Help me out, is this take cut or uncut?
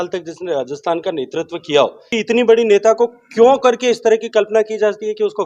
cut